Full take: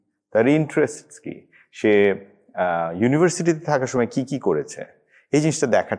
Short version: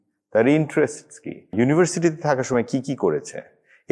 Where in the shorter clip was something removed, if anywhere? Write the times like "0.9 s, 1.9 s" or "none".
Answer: 1.5 s